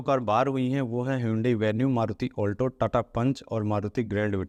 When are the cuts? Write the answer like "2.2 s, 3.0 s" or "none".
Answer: none